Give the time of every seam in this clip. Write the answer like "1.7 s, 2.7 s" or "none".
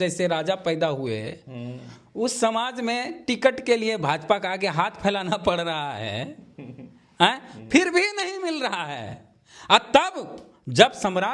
none